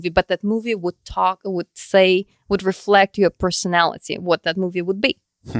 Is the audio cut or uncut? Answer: uncut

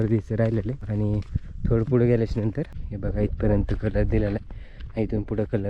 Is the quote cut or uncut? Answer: cut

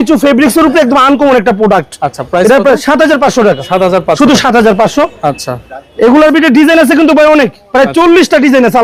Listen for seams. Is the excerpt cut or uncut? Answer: uncut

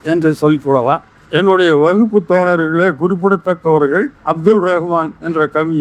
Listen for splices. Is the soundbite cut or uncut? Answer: cut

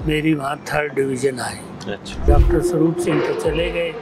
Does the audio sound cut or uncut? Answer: cut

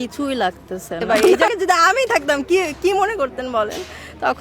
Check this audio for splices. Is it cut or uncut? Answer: cut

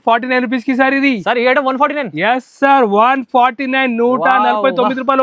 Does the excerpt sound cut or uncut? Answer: uncut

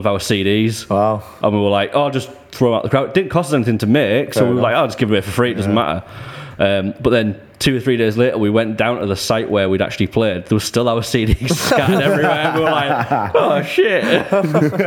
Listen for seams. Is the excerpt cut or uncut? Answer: uncut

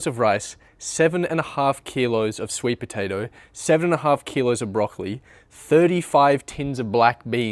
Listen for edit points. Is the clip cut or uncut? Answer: uncut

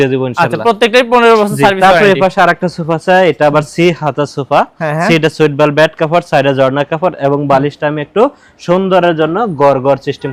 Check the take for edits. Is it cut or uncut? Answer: uncut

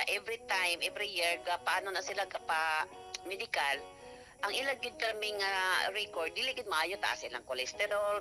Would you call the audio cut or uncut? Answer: uncut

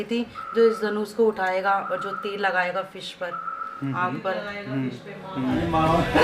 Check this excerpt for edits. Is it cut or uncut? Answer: uncut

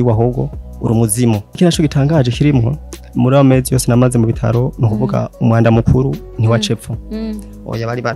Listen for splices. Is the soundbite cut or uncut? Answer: cut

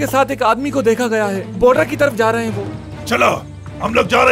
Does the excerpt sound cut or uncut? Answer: cut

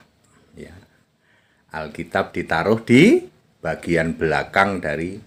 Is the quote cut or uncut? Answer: uncut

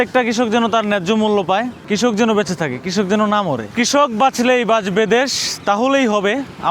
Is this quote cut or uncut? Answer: cut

